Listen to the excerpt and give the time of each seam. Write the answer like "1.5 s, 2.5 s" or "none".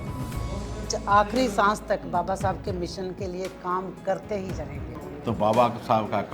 4.9 s